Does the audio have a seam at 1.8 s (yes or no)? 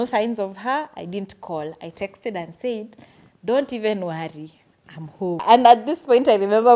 no